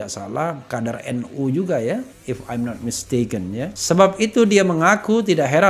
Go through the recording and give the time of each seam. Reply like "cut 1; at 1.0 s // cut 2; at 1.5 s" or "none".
cut 1; at 3.8 s